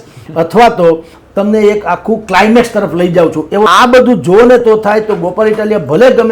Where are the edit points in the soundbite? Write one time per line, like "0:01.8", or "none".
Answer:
0:03.7